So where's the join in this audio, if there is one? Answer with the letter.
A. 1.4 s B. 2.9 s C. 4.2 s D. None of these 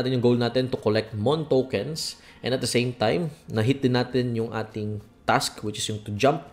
D